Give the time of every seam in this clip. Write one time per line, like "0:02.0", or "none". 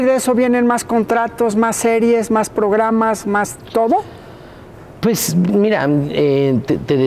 none